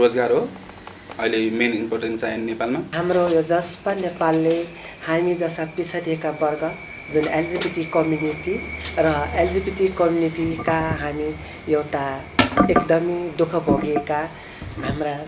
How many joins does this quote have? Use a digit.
0